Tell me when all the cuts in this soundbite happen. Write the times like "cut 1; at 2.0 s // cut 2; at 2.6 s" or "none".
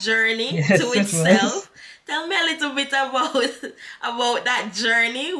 none

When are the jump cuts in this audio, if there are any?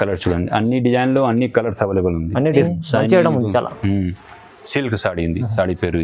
cut 1; at 2.5 s

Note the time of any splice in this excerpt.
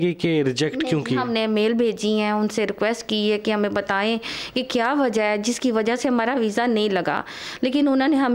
none

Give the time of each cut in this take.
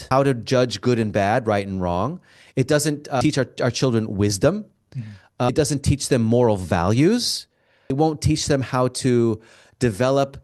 cut 1; at 5.5 s // cut 2; at 7.8 s

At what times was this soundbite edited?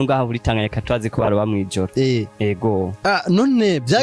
none

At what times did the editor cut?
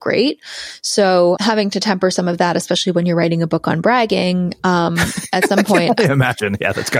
cut 1; at 1.4 s

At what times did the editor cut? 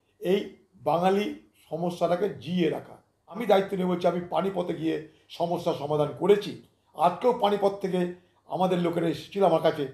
cut 1; at 3.4 s

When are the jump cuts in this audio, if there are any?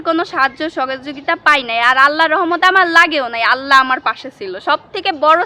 none

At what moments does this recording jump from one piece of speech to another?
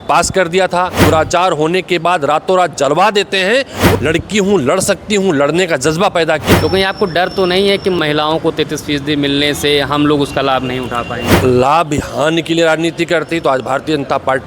cut 1; at 1.0 s // cut 2; at 4.0 s // cut 3; at 6.5 s // cut 4; at 8.0 s // cut 5; at 11.4 s

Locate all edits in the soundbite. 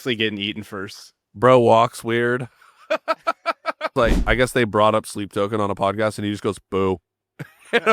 cut 1; at 4.2 s

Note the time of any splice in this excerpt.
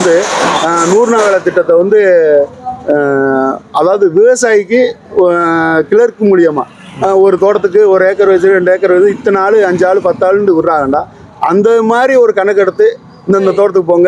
none

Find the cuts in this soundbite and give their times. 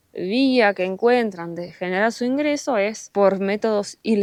none

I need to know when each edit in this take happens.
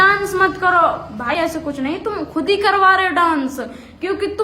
cut 1; at 1.3 s

